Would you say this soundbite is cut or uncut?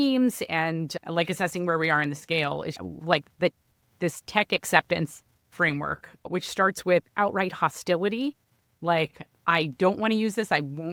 uncut